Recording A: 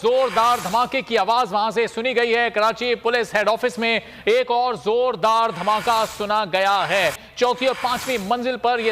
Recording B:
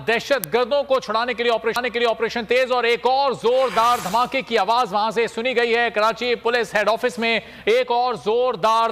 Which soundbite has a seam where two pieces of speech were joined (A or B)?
A